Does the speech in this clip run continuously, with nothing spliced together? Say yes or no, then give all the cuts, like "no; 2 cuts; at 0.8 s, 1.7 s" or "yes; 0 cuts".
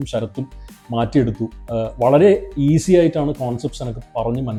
yes; 0 cuts